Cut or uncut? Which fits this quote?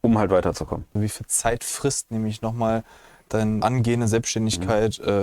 cut